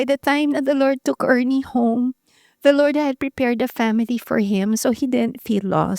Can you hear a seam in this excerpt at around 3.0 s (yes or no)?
no